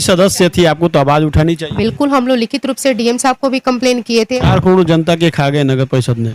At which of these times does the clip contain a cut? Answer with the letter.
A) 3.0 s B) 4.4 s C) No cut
B